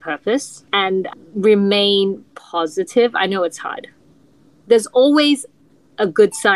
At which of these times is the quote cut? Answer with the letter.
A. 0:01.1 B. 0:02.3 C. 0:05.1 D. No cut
A